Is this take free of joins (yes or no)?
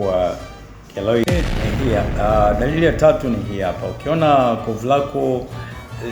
no